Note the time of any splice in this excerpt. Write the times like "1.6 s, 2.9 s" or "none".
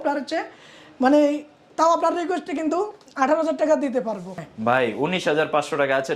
4.3 s